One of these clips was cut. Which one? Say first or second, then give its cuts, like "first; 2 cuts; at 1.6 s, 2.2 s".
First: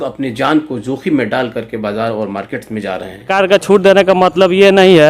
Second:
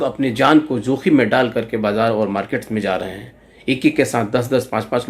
first; 1 cut; at 3.3 s